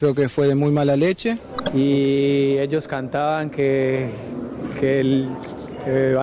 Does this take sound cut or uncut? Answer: cut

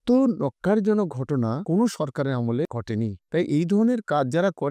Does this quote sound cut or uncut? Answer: cut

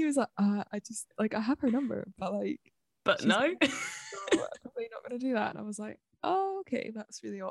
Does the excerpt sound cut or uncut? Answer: uncut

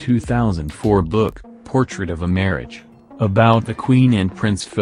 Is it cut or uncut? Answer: cut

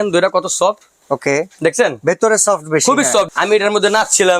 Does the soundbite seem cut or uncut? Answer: cut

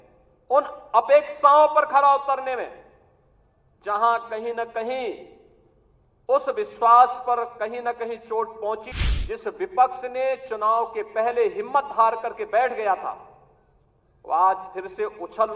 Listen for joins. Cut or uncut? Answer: cut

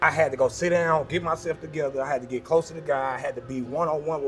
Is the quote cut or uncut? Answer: uncut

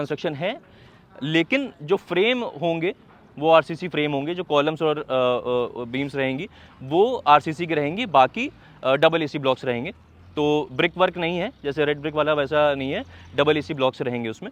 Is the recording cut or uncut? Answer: uncut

